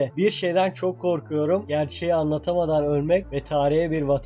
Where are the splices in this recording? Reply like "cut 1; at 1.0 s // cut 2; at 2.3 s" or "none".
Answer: none

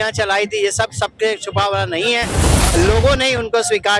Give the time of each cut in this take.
cut 1; at 2.5 s

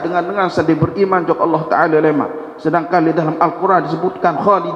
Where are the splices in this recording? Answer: none

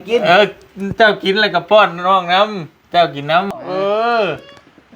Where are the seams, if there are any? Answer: cut 1; at 3.6 s

